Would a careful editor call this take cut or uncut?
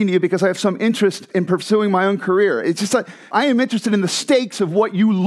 cut